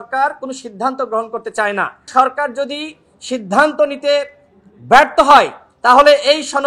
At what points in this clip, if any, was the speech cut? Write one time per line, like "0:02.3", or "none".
0:02.1